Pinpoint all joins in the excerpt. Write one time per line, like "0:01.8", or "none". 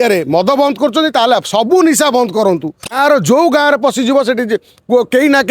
0:02.9